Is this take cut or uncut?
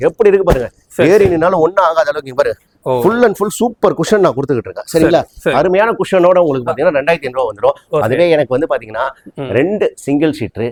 uncut